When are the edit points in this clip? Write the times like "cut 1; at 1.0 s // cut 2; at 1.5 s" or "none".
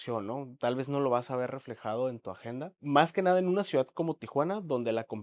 cut 1; at 2.8 s